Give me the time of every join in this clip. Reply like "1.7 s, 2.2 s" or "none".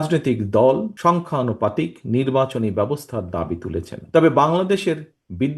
0.9 s, 3.9 s